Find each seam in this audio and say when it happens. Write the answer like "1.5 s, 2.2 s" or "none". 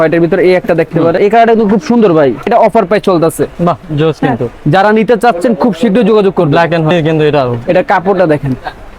1.2 s, 2.5 s, 6.9 s